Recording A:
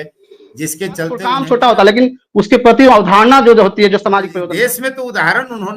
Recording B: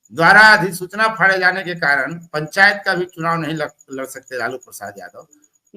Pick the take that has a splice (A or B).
A